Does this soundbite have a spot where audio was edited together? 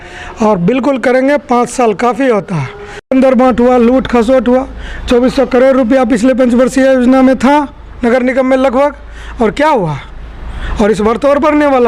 yes; 1 cut; at 3.1 s

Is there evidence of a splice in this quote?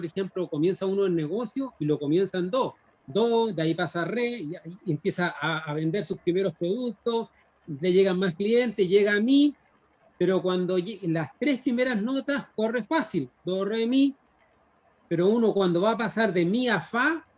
no; 0 cuts

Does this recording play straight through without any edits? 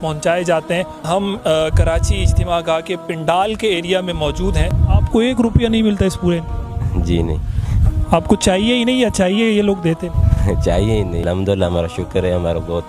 no; 3 cuts; at 1.0 s, 4.8 s, 11.2 s

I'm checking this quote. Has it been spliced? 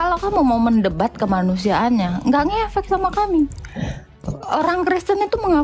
no; 0 cuts

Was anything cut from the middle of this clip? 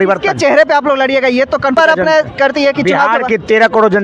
yes; 1 cut; at 1.8 s

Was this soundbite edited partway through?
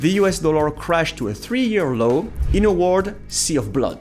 yes; 1 cut; at 2.4 s

